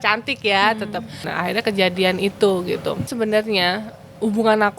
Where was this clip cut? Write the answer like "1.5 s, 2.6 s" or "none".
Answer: 1.3 s, 3.1 s